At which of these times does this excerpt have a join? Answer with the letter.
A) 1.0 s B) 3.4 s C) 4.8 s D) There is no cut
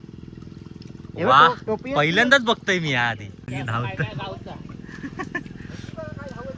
B